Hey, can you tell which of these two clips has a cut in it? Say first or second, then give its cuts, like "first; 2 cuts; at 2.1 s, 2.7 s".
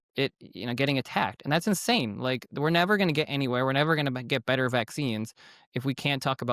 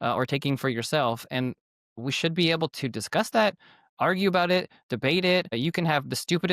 second; 1 cut; at 5.6 s